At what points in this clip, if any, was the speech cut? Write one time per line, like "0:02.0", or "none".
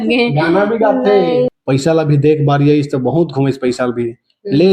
0:01.5

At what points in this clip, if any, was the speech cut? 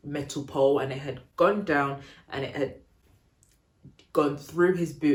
none

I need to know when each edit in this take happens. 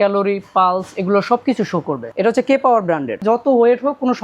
0:02.1
0:03.2

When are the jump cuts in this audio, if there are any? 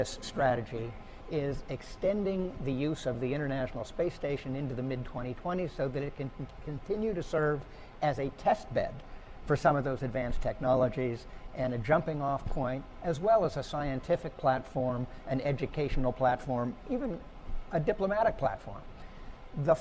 0:02.3

